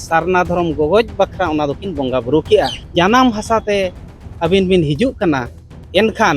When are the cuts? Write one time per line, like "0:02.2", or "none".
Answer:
0:02.8